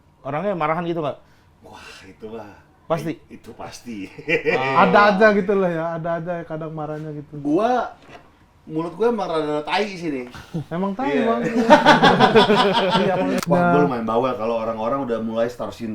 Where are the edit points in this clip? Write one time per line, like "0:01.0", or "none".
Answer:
0:13.4